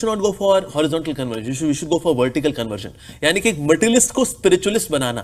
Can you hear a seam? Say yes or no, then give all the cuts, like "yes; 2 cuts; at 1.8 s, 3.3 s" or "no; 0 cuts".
no; 0 cuts